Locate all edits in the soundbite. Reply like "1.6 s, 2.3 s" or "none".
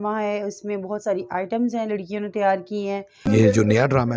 3.3 s

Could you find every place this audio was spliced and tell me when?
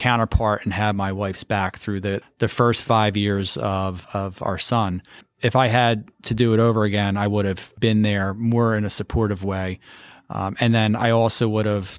2.2 s, 4.0 s, 5.2 s, 7.7 s

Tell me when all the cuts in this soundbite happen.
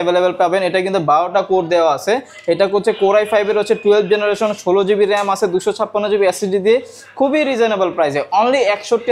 none

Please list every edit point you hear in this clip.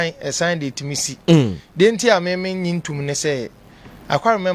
none

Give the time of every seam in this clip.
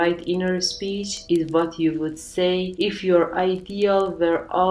none

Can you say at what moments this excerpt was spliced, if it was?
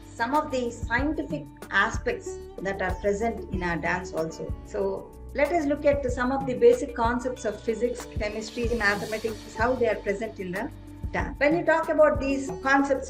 4.5 s, 11.3 s

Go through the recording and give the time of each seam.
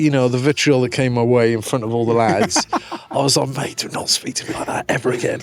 none

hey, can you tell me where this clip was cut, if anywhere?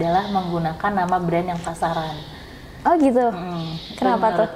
none

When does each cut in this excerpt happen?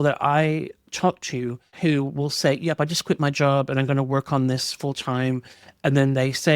1.6 s

